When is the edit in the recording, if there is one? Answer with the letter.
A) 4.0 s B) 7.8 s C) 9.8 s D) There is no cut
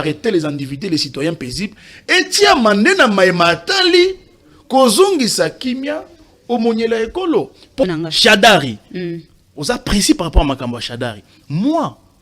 B